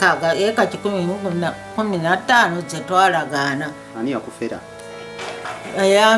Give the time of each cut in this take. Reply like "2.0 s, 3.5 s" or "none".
3.8 s